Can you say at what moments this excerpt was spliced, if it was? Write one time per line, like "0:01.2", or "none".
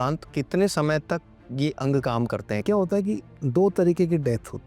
0:02.6